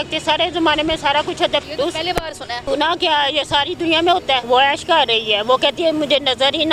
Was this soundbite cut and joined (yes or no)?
yes